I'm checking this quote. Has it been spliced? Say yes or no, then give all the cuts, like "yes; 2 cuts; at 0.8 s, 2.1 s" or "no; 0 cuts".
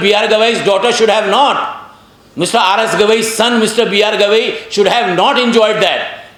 no; 0 cuts